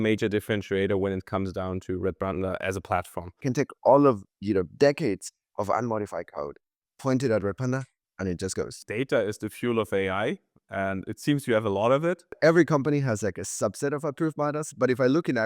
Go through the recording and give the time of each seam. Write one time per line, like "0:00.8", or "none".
0:03.4
0:08.8
0:12.4